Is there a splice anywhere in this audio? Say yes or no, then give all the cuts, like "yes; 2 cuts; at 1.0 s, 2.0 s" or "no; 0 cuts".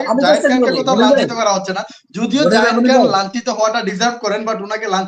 no; 0 cuts